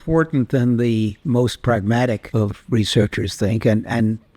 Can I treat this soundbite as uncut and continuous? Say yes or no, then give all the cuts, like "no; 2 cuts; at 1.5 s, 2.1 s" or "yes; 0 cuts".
no; 2 cuts; at 1.2 s, 2.2 s